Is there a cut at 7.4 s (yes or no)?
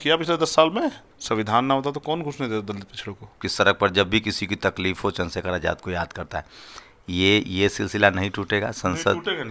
no